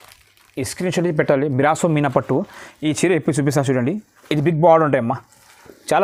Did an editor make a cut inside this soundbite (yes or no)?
no